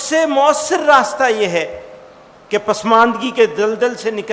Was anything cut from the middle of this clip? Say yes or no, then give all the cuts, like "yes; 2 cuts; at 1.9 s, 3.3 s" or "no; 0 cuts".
no; 0 cuts